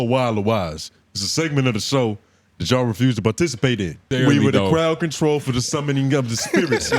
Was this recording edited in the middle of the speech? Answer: yes; 1 cut; at 4.0 s

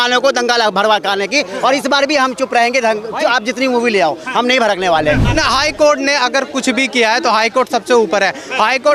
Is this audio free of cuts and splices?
no; 1 cut; at 5.3 s

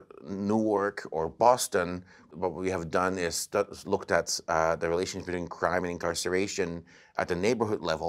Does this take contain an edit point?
yes; 1 cut; at 2.2 s

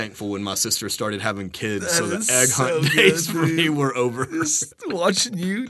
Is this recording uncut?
yes; 0 cuts

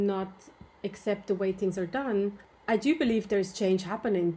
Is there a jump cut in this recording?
no; 0 cuts

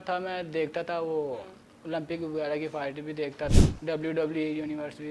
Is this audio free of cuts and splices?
no; 1 cut; at 3.5 s

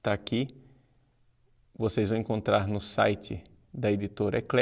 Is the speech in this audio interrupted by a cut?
no; 0 cuts

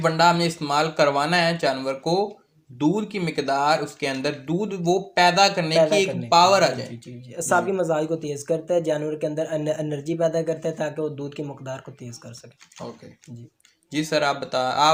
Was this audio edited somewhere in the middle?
no; 0 cuts

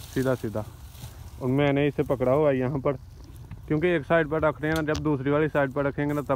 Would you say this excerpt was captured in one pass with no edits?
yes; 0 cuts

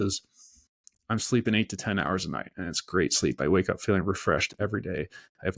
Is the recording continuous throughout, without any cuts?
yes; 0 cuts

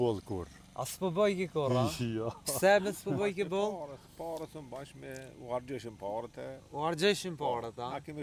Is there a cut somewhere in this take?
no; 0 cuts

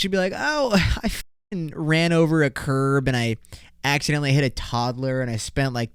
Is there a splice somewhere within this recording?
no; 0 cuts

